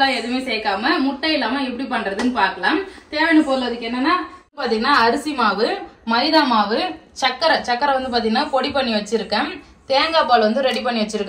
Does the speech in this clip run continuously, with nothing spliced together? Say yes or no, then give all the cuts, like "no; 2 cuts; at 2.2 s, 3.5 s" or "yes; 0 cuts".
yes; 0 cuts